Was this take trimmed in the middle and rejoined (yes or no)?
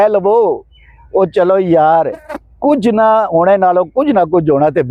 no